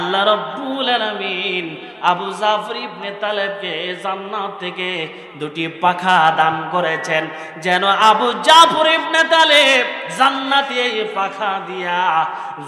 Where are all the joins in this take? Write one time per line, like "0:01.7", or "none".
none